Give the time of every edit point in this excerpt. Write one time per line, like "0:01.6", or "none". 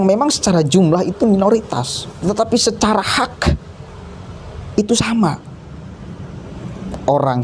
0:02.1